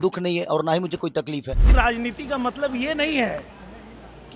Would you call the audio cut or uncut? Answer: cut